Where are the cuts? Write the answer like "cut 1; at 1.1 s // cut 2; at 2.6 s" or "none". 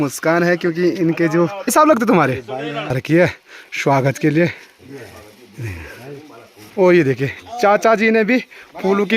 cut 1; at 1.3 s // cut 2; at 3.0 s

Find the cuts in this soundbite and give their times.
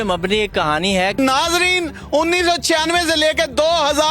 cut 1; at 1.2 s

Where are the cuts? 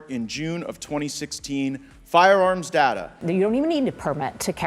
cut 1; at 3.1 s

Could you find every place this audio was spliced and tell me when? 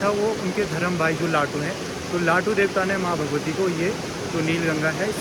none

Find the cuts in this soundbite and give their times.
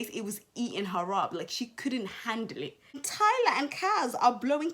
cut 1; at 3.1 s

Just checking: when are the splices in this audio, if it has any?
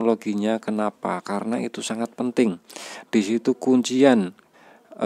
none

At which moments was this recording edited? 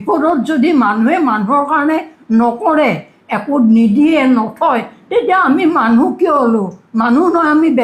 none

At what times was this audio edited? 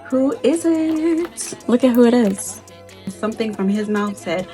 cut 1; at 3.1 s

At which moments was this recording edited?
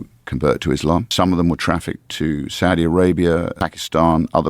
cut 1; at 1.1 s // cut 2; at 3.6 s

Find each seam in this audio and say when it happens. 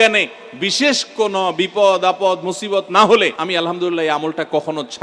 cut 1; at 3.4 s

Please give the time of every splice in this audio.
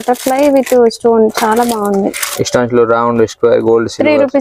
none

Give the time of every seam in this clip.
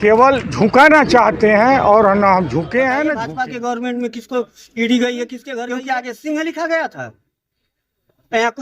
cut 1; at 3.3 s // cut 2; at 5.5 s

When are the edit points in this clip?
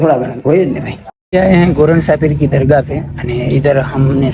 cut 1; at 1.3 s

